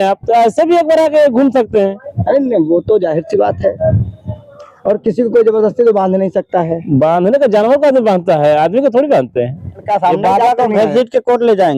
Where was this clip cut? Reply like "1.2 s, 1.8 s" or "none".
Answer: 9.8 s

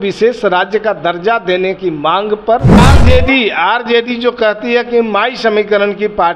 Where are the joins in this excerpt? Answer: 2.8 s

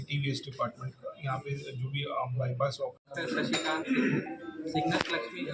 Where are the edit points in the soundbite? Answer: 3.1 s

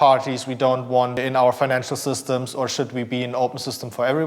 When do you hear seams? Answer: 1.2 s

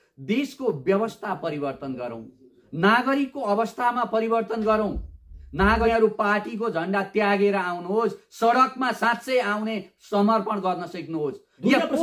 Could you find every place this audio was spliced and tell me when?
5.8 s

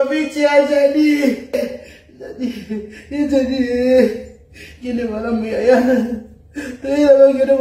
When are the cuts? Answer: 1.7 s

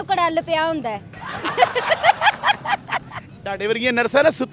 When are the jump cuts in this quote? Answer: 3.2 s

